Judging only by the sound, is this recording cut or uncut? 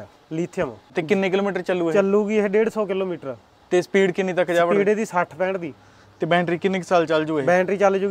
cut